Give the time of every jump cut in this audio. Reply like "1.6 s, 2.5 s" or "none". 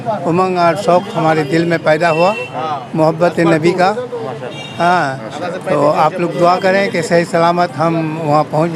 none